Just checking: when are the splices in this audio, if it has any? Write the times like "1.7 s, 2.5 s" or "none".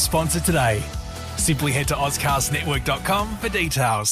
none